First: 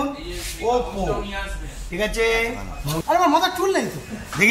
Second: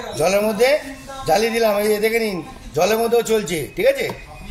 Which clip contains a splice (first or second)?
first